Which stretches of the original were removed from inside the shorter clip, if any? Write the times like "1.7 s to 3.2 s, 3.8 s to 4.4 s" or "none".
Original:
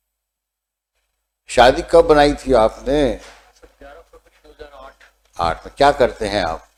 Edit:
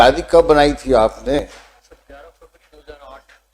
3.0 s to 3.1 s